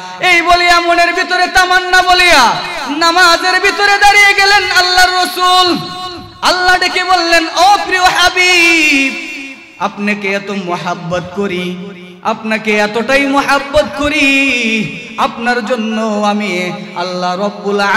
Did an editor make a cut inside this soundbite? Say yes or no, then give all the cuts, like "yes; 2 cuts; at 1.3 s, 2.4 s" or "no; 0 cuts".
no; 0 cuts